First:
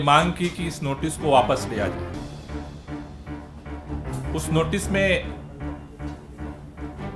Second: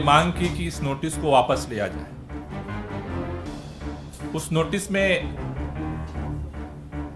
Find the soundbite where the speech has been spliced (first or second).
second